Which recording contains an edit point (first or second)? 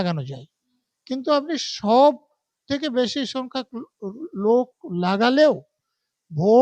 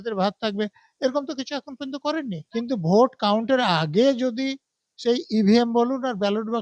second